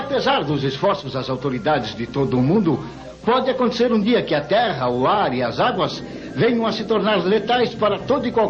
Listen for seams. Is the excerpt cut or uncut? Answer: uncut